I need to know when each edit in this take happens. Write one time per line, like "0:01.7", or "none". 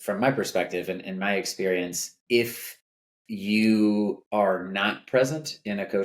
0:02.1
0:04.2